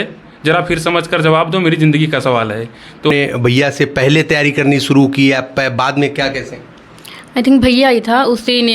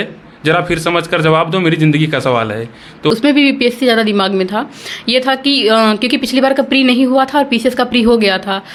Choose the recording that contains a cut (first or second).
first